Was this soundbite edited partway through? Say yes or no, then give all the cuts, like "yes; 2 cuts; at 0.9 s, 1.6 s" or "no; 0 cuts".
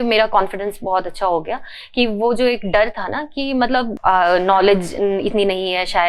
no; 0 cuts